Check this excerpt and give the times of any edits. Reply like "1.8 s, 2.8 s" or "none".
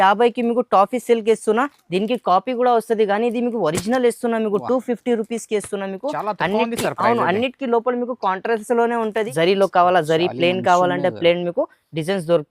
9.3 s